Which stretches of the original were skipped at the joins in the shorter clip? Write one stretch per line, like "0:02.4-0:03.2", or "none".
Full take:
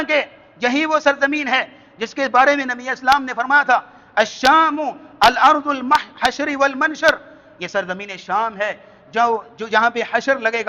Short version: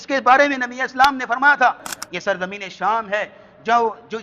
0:04.0-0:07.4